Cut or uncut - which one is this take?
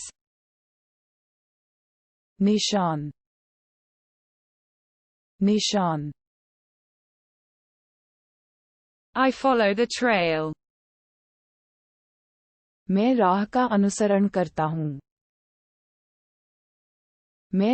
uncut